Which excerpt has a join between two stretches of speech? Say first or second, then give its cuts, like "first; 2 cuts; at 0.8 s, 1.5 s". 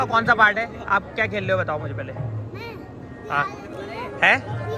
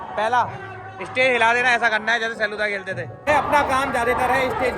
second; 1 cut; at 3.3 s